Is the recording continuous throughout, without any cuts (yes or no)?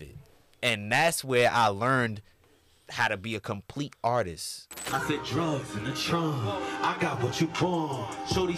no